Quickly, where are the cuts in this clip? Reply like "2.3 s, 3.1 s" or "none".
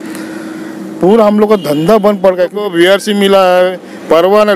2.6 s